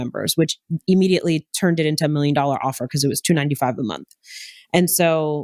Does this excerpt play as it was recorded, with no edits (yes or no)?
yes